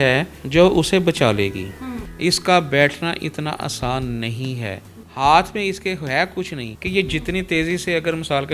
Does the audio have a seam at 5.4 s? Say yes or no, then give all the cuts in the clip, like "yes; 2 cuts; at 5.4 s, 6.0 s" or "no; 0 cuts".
no; 2 cuts; at 1.9 s, 6.8 s